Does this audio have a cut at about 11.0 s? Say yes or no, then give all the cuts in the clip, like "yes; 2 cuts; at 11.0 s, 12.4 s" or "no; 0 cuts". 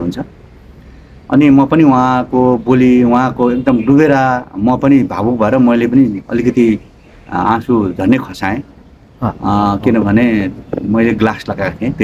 no; 0 cuts